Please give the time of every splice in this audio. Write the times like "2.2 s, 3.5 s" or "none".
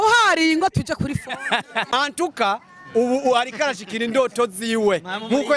1.9 s